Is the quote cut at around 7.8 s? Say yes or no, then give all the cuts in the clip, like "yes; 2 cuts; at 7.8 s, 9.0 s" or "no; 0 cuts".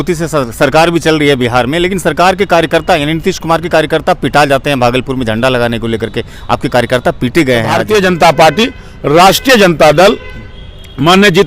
yes; 1 cut; at 7.8 s